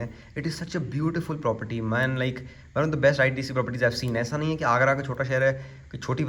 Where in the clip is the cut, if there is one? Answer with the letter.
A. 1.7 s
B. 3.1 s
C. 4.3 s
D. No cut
D